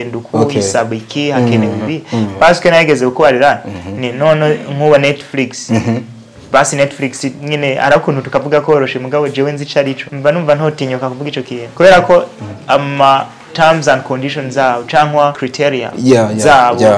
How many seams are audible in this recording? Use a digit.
3